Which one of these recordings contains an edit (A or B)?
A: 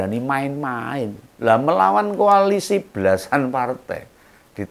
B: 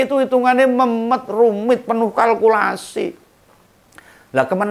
A